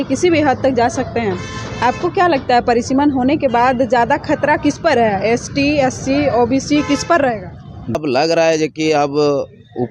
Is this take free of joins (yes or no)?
no